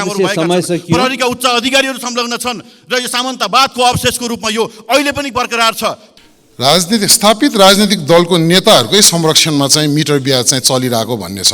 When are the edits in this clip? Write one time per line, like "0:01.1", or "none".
0:06.0

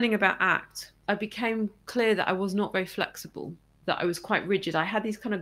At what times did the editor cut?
0:00.9

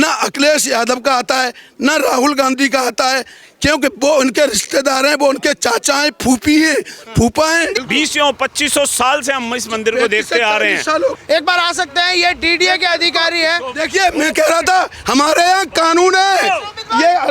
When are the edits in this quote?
0:07.7
0:11.1

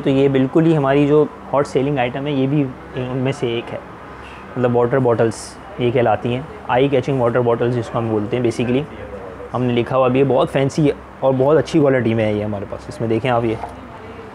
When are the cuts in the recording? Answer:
none

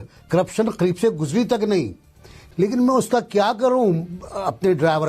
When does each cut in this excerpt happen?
0:02.4

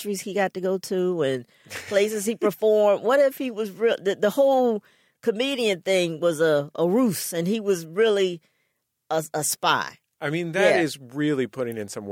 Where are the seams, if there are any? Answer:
none

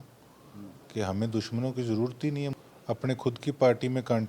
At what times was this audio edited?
0:02.5

